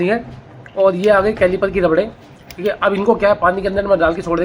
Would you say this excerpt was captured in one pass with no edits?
yes; 0 cuts

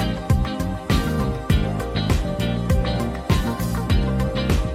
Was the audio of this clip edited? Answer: no; 0 cuts

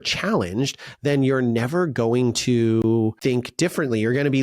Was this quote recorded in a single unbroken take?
no; 1 cut; at 3.2 s

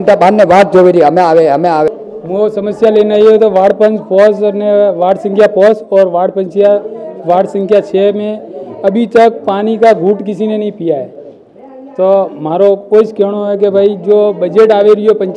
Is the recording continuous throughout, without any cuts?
no; 1 cut; at 1.9 s

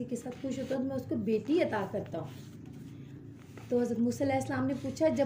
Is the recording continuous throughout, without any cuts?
yes; 0 cuts

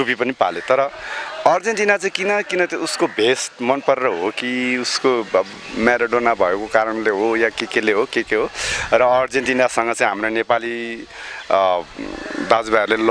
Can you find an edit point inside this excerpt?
no; 0 cuts

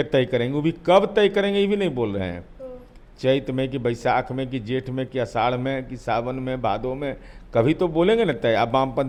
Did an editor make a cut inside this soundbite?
no; 0 cuts

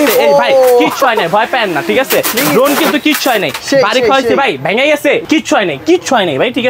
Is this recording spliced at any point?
no; 0 cuts

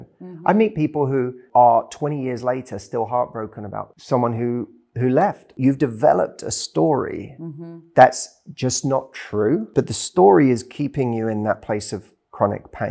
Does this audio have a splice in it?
yes; 4 cuts; at 1.4 s, 3.9 s, 5.5 s, 9.7 s

